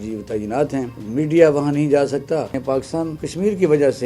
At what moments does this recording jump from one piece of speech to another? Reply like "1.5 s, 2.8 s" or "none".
1.0 s, 2.9 s